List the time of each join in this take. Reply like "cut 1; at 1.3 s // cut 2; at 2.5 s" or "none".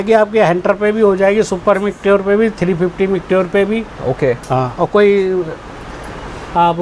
none

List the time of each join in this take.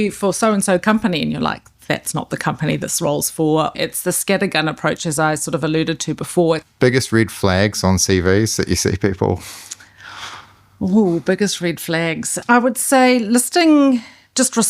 cut 1; at 3.7 s // cut 2; at 6.6 s // cut 3; at 12.3 s

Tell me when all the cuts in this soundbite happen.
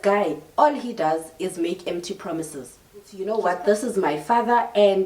cut 1; at 3.2 s

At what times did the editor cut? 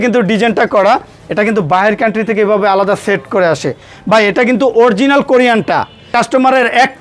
cut 1; at 6.1 s

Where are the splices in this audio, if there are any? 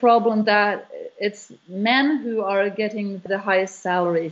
cut 1; at 3.2 s

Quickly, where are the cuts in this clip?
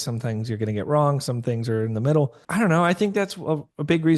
cut 1; at 2.4 s

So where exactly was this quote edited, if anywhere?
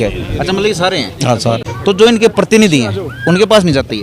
cut 1; at 1.7 s

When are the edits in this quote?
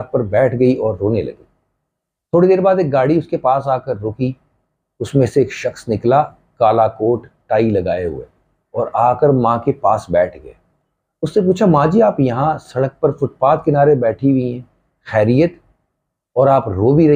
none

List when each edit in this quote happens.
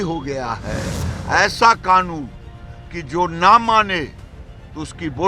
cut 1; at 1.1 s

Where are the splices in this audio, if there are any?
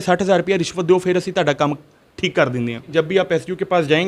cut 1; at 2.9 s

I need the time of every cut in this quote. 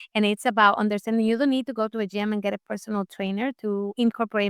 none

